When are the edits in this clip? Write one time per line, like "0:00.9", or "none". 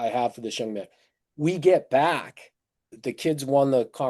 0:02.9